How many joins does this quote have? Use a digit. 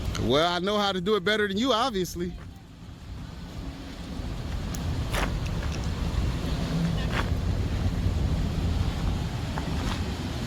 0